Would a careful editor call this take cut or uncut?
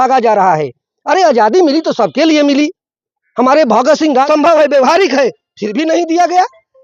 cut